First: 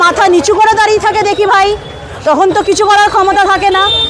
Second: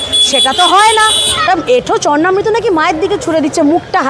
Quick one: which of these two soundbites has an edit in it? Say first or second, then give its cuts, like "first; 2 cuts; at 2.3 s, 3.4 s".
second; 1 cut; at 1.4 s